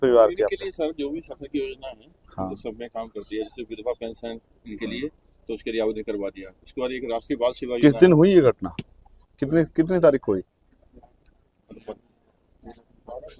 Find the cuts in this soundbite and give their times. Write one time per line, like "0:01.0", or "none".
none